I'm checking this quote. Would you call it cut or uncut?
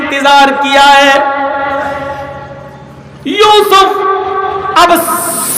uncut